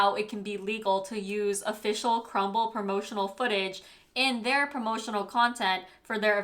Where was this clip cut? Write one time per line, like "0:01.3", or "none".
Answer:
none